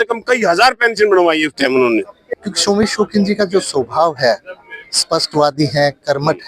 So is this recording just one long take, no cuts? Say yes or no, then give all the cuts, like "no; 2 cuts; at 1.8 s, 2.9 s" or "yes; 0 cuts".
no; 1 cut; at 2.2 s